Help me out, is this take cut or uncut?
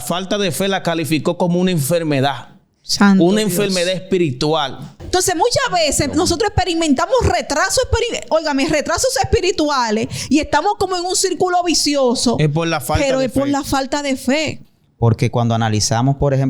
cut